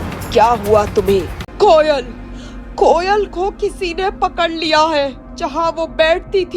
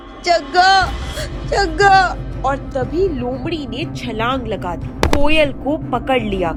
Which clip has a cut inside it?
first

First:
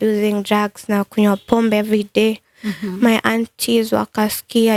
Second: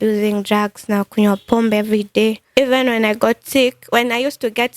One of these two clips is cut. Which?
second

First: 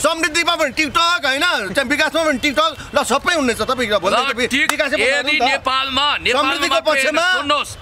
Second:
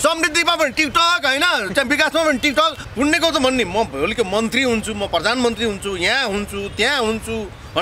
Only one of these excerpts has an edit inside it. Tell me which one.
second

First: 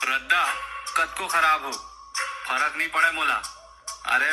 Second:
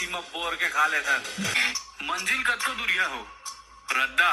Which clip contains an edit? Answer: second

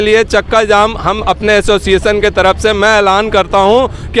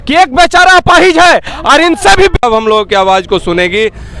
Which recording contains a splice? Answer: second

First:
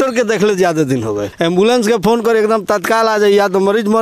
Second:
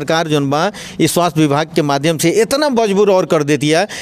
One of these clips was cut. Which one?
first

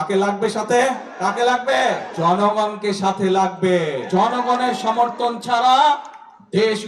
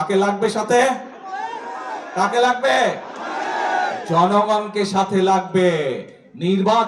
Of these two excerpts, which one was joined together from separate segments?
first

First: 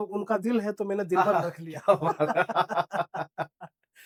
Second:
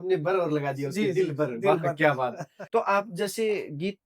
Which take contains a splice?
second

